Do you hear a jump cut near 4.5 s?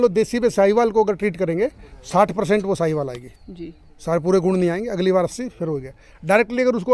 no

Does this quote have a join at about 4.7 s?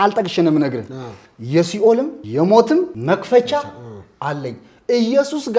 no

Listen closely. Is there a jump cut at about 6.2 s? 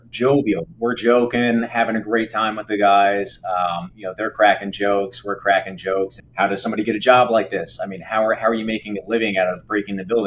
yes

